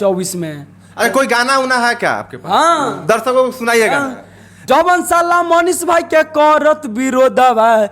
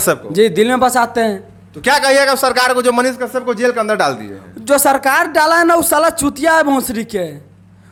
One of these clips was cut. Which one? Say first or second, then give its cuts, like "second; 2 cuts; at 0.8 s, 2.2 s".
first; 1 cut; at 4.6 s